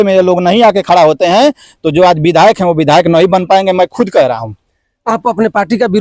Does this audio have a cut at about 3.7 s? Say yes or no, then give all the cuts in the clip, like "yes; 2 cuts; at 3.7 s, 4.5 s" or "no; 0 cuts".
no; 0 cuts